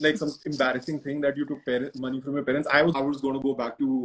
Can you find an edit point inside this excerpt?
yes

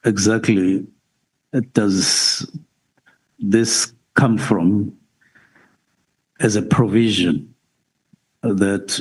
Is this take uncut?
yes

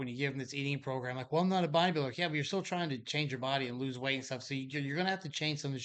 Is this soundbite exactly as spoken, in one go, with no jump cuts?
yes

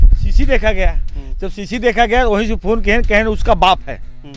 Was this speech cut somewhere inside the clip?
no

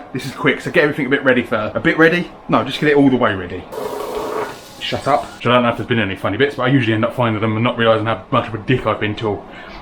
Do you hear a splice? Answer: yes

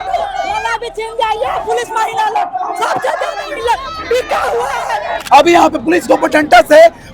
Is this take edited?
yes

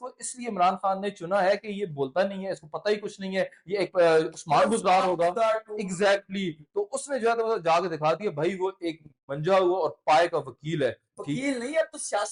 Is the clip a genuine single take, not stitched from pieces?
yes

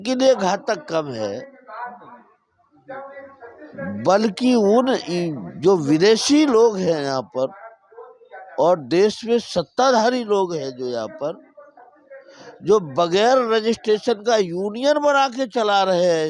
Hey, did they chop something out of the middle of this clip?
no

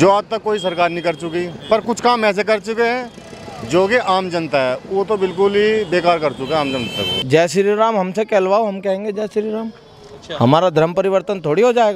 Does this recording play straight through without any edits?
no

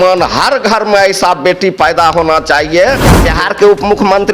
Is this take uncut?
no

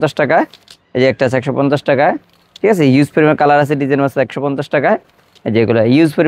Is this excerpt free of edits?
yes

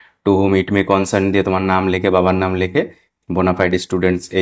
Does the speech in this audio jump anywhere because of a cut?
yes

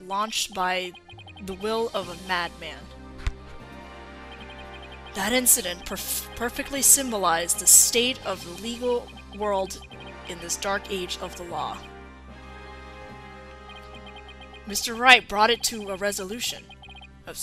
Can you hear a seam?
no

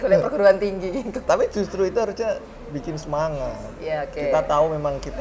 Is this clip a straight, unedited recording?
yes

